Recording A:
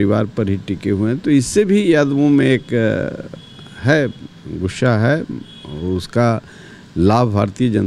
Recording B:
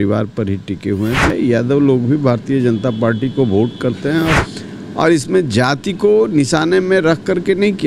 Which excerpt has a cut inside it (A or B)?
B